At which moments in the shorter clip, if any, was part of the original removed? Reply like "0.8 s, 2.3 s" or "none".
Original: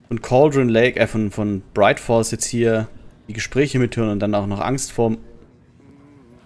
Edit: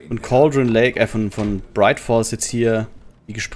none